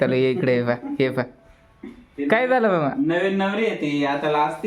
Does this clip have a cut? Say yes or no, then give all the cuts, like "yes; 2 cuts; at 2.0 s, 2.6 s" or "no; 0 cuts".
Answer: no; 0 cuts